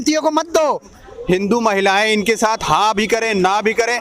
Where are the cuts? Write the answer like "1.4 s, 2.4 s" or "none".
0.9 s